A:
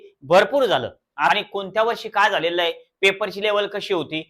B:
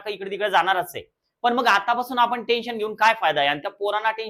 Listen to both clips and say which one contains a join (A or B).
A